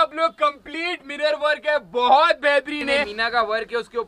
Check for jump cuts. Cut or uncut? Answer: cut